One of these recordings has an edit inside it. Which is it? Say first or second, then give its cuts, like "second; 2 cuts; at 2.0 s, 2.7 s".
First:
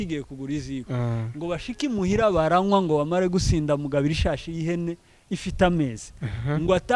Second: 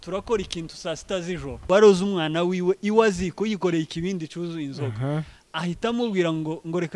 second; 1 cut; at 1.6 s